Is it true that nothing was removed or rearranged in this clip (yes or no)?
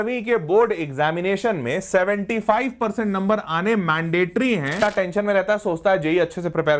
no